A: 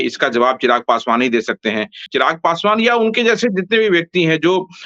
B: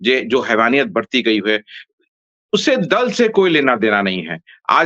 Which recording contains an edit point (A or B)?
A